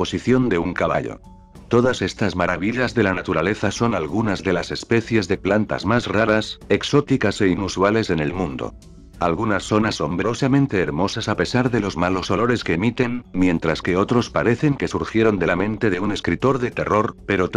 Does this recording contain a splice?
no; 0 cuts

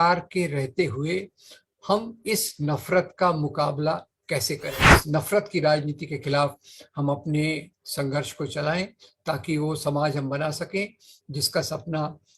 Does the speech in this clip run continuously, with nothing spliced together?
no; 1 cut; at 5.0 s

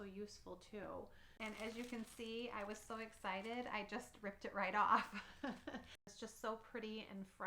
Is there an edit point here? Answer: yes; 2 cuts; at 1.3 s, 6.1 s

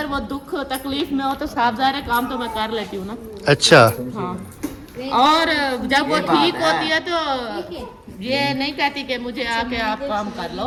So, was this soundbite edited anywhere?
no; 0 cuts

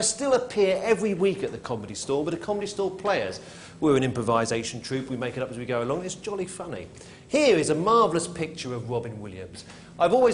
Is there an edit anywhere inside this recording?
no; 0 cuts

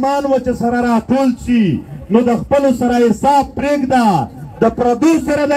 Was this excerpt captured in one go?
yes; 0 cuts

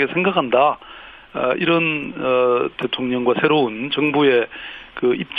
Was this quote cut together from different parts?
no; 0 cuts

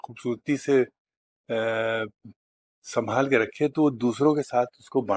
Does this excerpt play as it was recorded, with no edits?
yes; 0 cuts

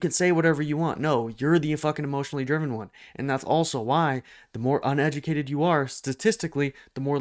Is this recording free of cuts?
yes; 0 cuts

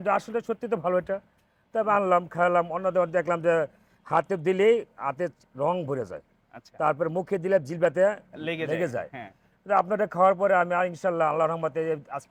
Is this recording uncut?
yes; 0 cuts

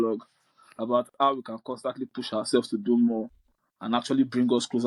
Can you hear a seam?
no; 0 cuts

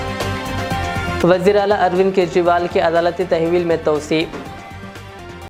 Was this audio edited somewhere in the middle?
no; 0 cuts

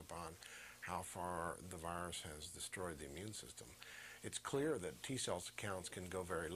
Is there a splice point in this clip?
no; 0 cuts

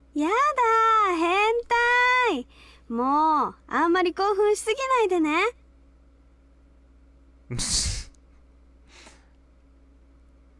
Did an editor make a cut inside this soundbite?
no; 0 cuts

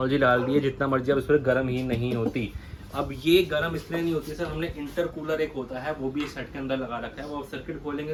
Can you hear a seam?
no; 0 cuts

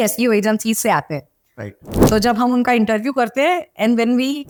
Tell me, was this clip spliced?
no; 0 cuts

